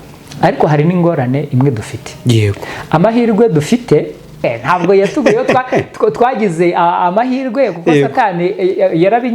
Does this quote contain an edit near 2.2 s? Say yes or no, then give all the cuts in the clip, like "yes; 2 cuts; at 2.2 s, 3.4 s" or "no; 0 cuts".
no; 1 cut; at 4.4 s